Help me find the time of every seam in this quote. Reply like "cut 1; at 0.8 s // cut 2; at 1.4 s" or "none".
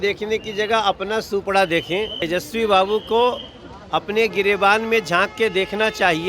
cut 1; at 2.2 s